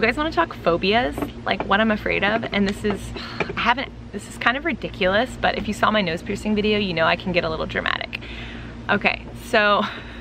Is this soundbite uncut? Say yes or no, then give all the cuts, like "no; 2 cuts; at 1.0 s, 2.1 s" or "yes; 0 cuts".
yes; 0 cuts